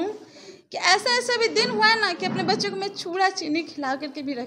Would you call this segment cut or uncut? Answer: uncut